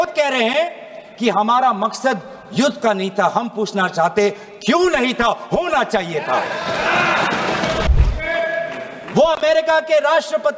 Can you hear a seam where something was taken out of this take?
yes; 1 cut; at 7.9 s

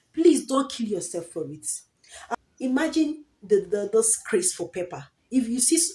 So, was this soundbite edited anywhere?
yes; 1 cut; at 2.3 s

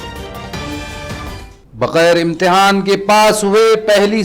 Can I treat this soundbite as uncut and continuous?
no; 1 cut; at 1.5 s

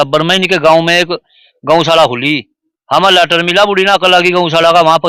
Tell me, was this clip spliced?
no; 0 cuts

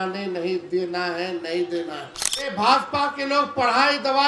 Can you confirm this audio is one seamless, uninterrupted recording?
no; 1 cut; at 2.5 s

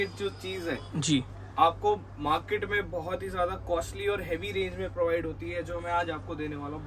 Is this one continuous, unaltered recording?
yes; 0 cuts

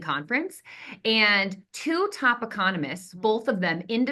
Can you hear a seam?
yes; 1 cut; at 3.0 s

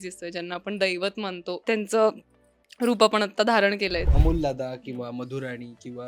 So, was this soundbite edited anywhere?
yes; 2 cuts; at 1.6 s, 4.1 s

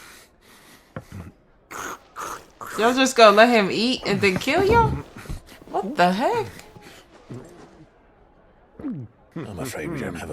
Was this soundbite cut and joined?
yes; 1 cut; at 9.3 s

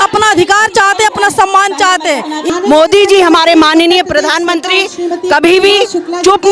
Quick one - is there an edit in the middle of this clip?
yes; 1 cut; at 2.5 s

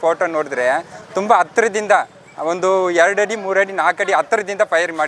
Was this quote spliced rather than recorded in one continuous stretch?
no; 0 cuts

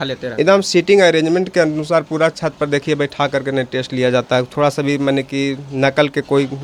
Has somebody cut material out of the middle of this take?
no; 0 cuts

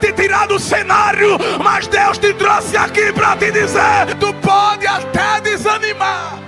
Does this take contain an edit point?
yes; 1 cut; at 4.2 s

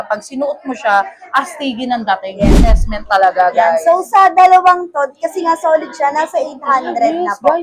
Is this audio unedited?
no; 1 cut; at 2.8 s

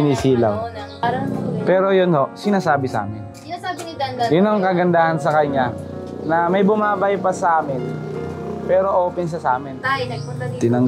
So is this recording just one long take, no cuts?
no; 2 cuts; at 0.9 s, 9.8 s

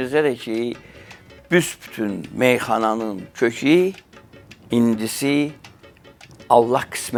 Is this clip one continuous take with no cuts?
yes; 0 cuts

